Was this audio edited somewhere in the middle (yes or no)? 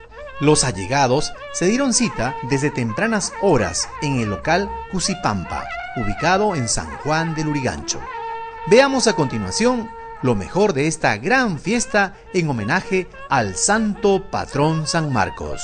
yes